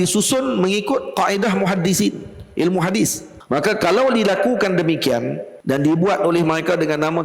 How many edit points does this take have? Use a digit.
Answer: 2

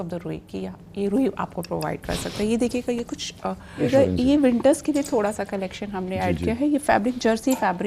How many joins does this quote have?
1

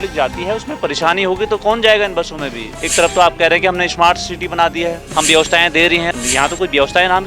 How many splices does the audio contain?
3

